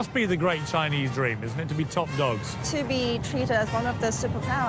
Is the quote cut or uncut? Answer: cut